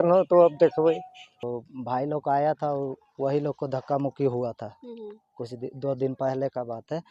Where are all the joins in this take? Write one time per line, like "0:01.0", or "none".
0:01.4